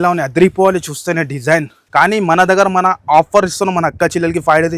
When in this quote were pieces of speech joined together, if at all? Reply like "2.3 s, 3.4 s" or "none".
1.8 s